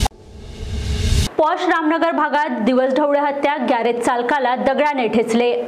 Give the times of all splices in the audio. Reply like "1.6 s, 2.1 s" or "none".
1.0 s